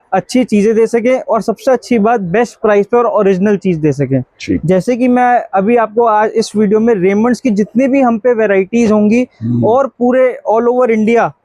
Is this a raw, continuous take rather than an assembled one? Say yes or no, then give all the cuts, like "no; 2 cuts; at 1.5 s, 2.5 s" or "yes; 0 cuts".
yes; 0 cuts